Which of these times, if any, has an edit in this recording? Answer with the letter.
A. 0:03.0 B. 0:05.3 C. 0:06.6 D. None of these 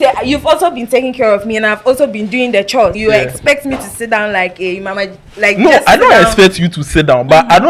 A